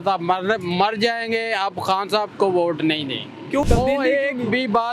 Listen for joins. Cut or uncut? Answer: cut